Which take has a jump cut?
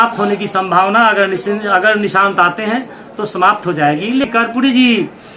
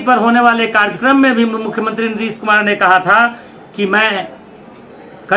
first; 1 cut; at 4.3 s

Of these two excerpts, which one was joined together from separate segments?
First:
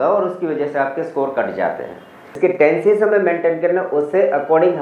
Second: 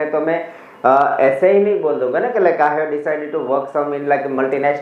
first; 1 cut; at 2.4 s

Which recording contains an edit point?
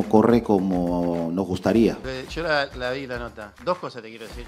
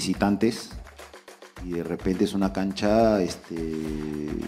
first; 2 cuts; at 2.0 s, 3.6 s

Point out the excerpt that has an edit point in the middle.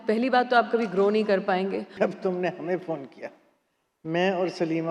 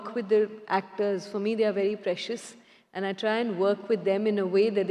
first; 1 cut; at 1.9 s

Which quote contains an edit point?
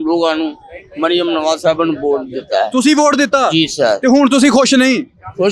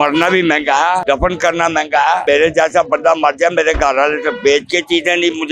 second; 2 cuts; at 1.0 s, 2.2 s

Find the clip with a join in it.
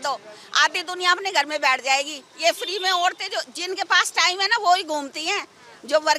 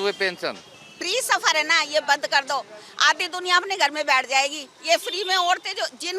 second; 1 cut; at 0.9 s

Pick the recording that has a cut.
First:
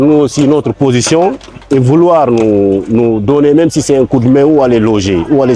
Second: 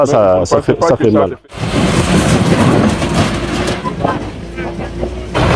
second; 1 cut; at 1.4 s

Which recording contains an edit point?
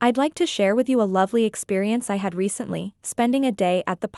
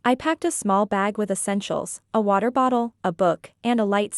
second; 1 cut; at 2.0 s

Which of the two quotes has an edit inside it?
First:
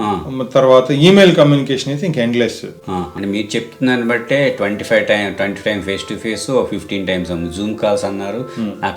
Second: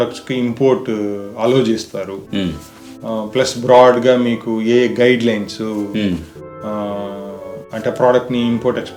first; 1 cut; at 3.1 s

